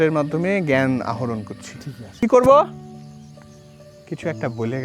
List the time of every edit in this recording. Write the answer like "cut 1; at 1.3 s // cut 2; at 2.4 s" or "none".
cut 1; at 2.2 s // cut 2; at 2.7 s // cut 3; at 4.0 s